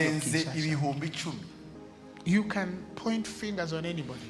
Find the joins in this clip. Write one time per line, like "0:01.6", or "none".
0:01.8